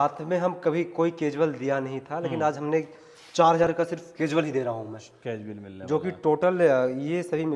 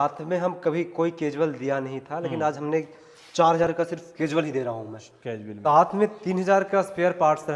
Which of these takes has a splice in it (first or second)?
second